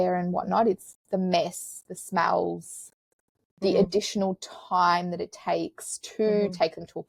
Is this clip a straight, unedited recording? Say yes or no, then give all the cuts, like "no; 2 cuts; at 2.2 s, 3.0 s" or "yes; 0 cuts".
yes; 0 cuts